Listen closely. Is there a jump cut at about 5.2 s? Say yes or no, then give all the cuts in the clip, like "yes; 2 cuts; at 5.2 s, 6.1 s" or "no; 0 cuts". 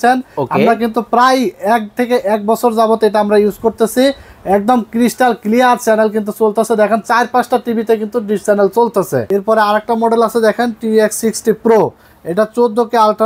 no; 1 cut; at 9.2 s